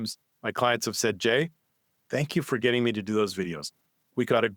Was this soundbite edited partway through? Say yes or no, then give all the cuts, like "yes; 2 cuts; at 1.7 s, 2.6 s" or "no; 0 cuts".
no; 0 cuts